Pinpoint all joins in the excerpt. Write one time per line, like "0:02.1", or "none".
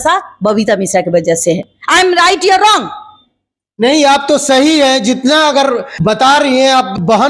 none